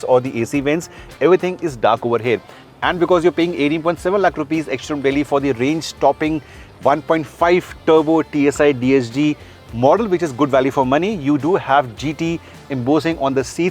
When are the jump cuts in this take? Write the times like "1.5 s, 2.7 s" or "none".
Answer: none